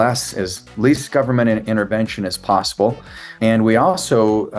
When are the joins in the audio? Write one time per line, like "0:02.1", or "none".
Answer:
0:03.2